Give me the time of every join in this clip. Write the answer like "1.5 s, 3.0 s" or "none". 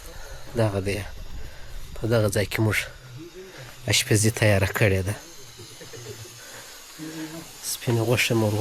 none